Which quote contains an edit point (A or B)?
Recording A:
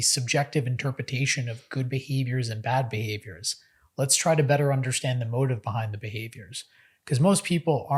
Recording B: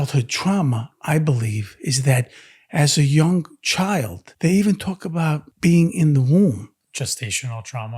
B